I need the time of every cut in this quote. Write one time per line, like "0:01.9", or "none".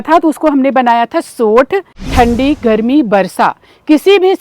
0:02.0